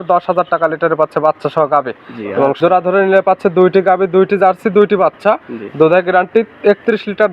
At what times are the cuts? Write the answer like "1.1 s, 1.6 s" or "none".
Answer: 2.6 s